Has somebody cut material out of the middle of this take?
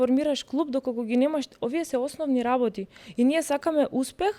no; 0 cuts

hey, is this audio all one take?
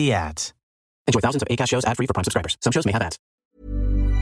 no; 1 cut; at 3.3 s

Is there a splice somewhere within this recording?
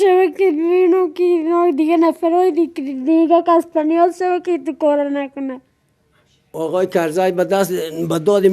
yes; 1 cut; at 1.3 s

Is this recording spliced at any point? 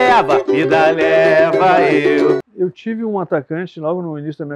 yes; 1 cut; at 2.4 s

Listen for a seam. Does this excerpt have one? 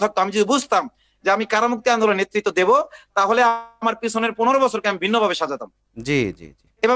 no; 0 cuts

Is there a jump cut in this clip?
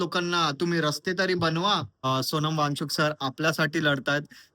yes; 1 cut; at 2.0 s

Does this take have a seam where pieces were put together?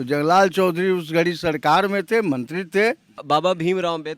yes; 1 cut; at 3.2 s

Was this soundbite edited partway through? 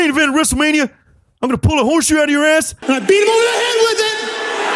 no; 0 cuts

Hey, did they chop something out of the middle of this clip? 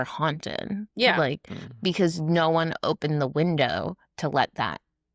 no; 0 cuts

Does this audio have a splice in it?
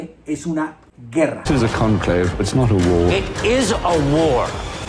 yes; 1 cut; at 1.5 s

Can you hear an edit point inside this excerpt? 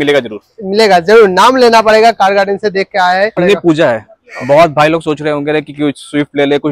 yes; 1 cut; at 3.4 s

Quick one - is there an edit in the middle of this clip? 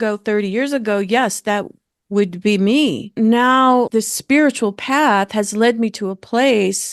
no; 0 cuts

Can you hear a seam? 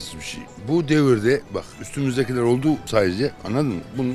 no; 0 cuts

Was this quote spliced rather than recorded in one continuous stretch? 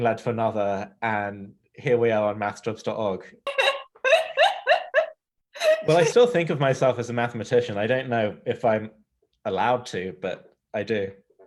yes; 1 cut; at 3.5 s

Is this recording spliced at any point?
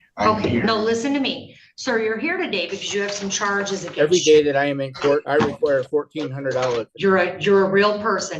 yes; 3 cuts; at 3.9 s, 5.2 s, 6.9 s

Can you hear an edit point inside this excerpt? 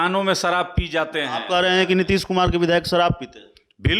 no; 0 cuts

